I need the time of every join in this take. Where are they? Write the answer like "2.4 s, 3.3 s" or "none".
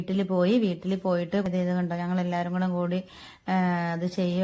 1.4 s